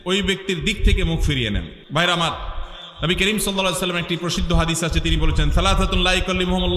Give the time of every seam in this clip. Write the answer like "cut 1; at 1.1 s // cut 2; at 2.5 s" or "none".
none

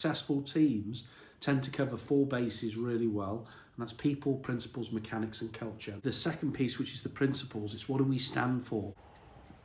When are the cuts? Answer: none

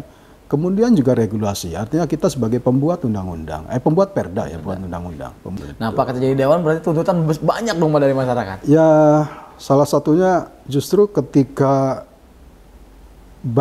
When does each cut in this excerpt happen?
cut 1; at 5.4 s

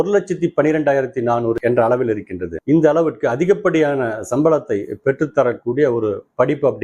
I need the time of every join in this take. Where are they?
none

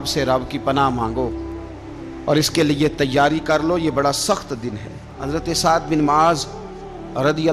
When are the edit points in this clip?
cut 1; at 5.1 s

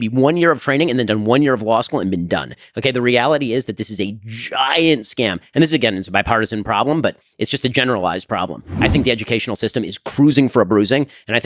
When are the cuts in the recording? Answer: cut 1; at 8.7 s

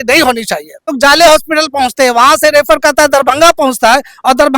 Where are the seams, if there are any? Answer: cut 1; at 1.0 s

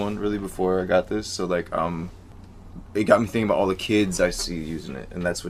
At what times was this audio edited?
none

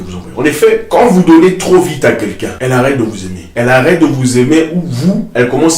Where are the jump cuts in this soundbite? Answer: cut 1; at 0.8 s // cut 2; at 2.5 s // cut 3; at 3.3 s

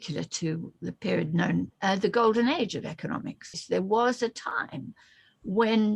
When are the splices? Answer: cut 1; at 1.7 s // cut 2; at 3.6 s

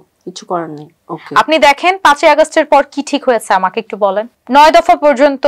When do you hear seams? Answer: cut 1; at 0.9 s // cut 2; at 4.3 s

